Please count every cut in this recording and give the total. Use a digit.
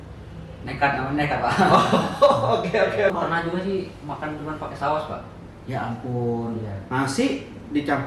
1